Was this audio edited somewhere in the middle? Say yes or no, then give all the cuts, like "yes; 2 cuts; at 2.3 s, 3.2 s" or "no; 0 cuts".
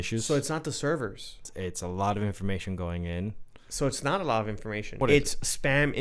yes; 2 cuts; at 1.5 s, 5.0 s